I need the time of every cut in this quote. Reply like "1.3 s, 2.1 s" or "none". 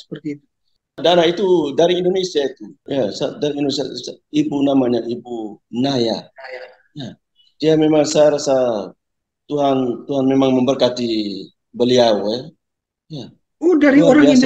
1.0 s, 2.7 s